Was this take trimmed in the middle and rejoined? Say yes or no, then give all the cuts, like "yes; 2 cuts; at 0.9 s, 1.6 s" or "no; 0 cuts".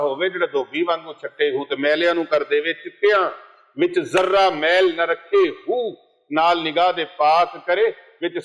no; 0 cuts